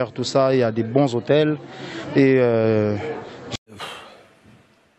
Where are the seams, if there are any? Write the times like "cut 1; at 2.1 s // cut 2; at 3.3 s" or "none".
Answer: cut 1; at 3.6 s